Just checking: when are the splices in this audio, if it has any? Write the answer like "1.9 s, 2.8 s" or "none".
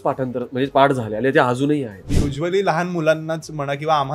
2.2 s